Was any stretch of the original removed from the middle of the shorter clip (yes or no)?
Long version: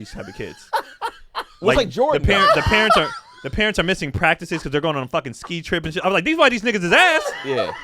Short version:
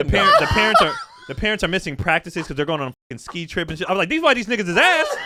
no